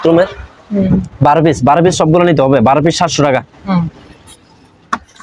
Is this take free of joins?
yes; 0 cuts

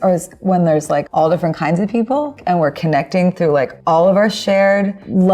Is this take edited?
yes; 3 cuts; at 1.1 s, 2.4 s, 3.8 s

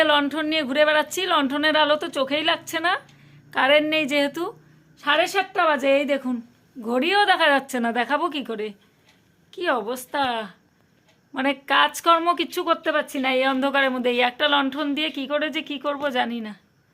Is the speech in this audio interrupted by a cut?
no; 0 cuts

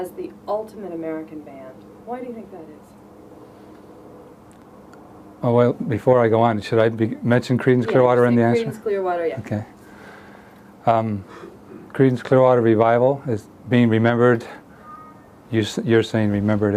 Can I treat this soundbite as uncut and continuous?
yes; 0 cuts

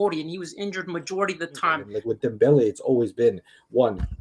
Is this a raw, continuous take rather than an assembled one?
no; 1 cut; at 1.9 s

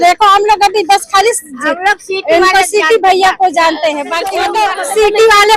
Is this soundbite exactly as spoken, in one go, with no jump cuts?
no; 1 cut; at 4.4 s

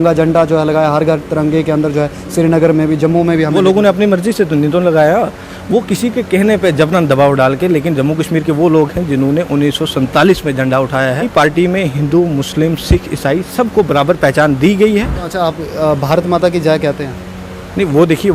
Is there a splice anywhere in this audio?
yes; 2 cuts; at 11.3 s, 15.2 s

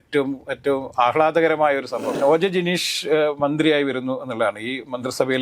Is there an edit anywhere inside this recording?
yes; 1 cut; at 2.1 s

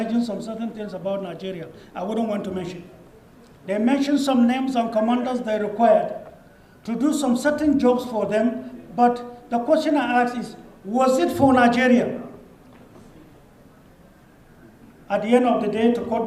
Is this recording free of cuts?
yes; 0 cuts

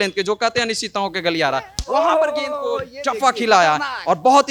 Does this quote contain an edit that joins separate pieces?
no; 0 cuts

